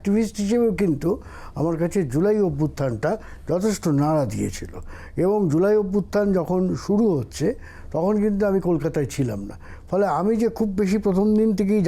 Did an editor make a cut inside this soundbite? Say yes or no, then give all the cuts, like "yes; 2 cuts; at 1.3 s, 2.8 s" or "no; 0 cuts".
no; 0 cuts